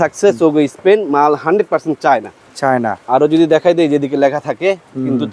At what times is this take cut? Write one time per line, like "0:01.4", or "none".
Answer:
none